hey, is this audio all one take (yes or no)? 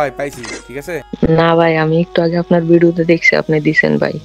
no